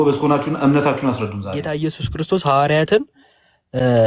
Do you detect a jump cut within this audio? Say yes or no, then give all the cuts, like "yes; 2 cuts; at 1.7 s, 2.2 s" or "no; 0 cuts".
yes; 1 cut; at 1.6 s